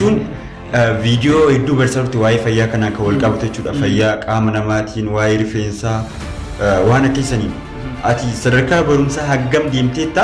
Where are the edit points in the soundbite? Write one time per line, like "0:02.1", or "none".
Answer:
none

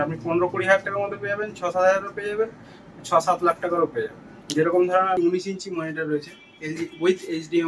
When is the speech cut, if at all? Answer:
0:05.2

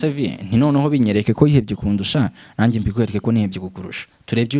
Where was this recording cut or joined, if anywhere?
none

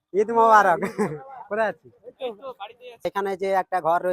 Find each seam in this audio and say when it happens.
0:03.0

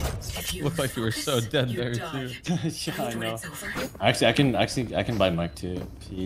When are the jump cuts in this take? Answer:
0:03.6

